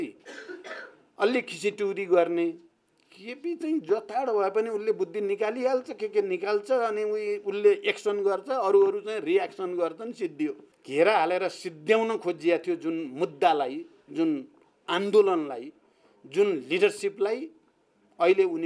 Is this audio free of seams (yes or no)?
no